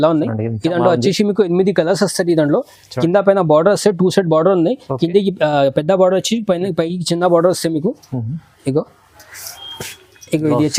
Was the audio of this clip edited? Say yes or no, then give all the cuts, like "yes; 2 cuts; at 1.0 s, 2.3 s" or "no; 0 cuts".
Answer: no; 0 cuts